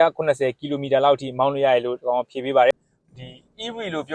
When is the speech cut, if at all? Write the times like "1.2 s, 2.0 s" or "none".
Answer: 2.7 s